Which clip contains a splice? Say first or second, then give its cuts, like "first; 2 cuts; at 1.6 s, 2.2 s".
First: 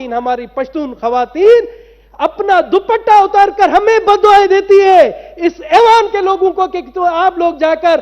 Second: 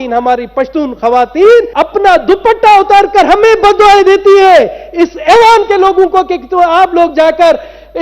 second; 1 cut; at 1.7 s